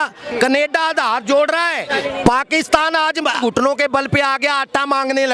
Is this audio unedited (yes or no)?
no